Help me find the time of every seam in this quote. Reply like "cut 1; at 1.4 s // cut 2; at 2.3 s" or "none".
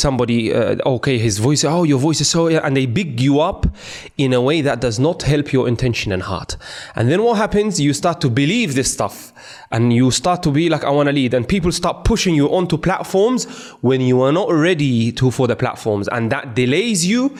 none